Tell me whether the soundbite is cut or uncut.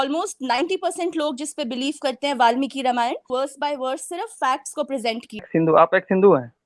cut